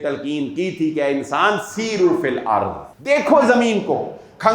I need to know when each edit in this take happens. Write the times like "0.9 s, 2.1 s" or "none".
2.9 s